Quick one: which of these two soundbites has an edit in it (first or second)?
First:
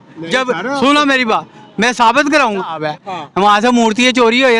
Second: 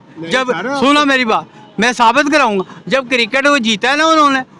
first